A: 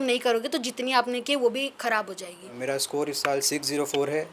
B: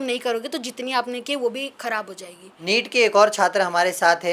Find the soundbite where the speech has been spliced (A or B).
A